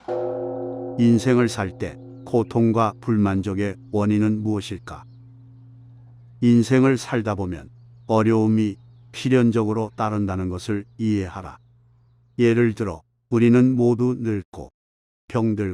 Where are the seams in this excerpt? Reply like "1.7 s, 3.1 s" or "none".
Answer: 0.9 s